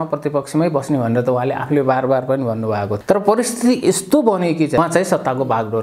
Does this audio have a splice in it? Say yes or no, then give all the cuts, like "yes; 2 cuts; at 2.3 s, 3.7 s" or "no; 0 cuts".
yes; 2 cuts; at 2.9 s, 4.8 s